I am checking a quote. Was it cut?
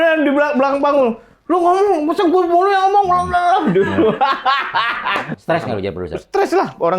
yes; 1 cut; at 5.3 s

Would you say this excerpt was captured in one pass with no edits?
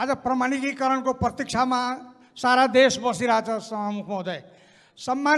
yes; 0 cuts

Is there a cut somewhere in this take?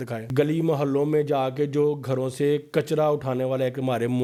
no; 0 cuts

